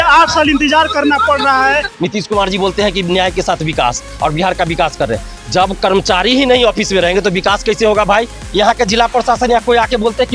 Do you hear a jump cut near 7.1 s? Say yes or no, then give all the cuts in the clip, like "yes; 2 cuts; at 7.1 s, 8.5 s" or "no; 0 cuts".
no; 2 cuts; at 1.9 s, 8.4 s